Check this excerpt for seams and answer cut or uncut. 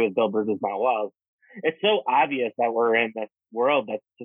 cut